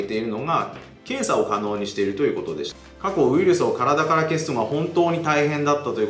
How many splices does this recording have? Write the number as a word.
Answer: one